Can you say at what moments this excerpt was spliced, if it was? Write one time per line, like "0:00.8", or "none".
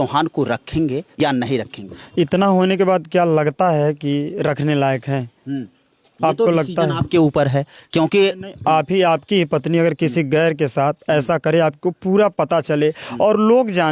0:01.1